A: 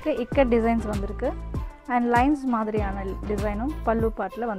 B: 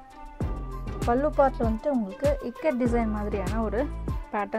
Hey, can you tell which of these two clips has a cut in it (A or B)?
B